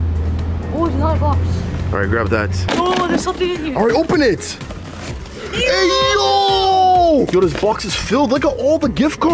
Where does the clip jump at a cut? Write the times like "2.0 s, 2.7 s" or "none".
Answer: 2.6 s, 7.3 s